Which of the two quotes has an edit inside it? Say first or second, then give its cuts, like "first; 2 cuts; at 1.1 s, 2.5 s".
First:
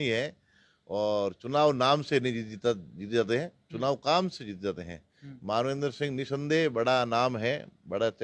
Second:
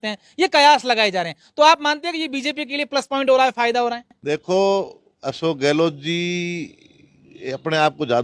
second; 1 cut; at 4.1 s